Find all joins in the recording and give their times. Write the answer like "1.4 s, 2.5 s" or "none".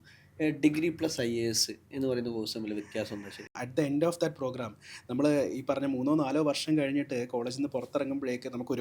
3.6 s